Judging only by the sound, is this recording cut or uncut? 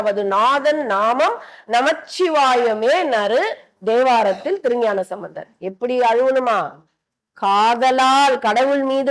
uncut